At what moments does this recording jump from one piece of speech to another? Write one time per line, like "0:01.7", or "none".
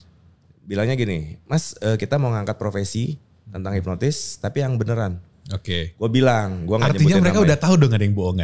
none